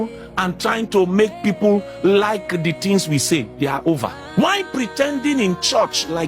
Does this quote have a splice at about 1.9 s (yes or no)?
no